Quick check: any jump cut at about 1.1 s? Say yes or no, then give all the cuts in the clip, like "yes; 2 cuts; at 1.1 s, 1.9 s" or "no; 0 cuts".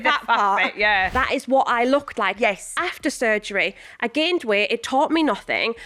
yes; 1 cut; at 1.1 s